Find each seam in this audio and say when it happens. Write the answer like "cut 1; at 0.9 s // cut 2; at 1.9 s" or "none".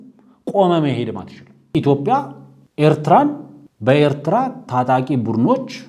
cut 1; at 1.7 s